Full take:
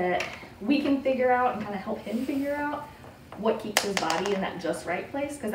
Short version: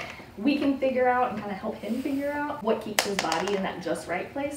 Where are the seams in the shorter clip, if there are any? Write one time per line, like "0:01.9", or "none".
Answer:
0:02.6